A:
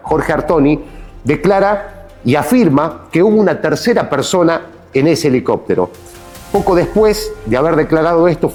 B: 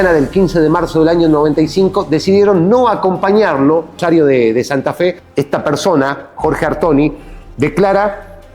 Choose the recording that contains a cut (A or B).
B